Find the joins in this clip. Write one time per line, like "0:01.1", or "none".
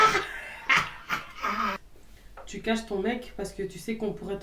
0:01.8